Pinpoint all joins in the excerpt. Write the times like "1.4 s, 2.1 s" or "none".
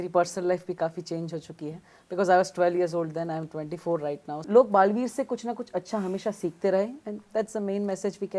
4.3 s